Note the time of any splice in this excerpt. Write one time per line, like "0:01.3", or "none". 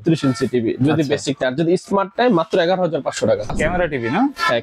0:03.5